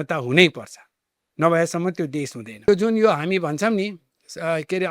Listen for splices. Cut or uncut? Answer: cut